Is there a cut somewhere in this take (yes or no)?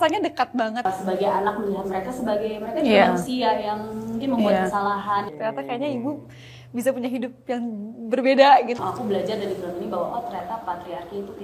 yes